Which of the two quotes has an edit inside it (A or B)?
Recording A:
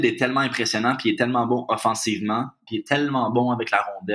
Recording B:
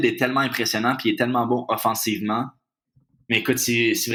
A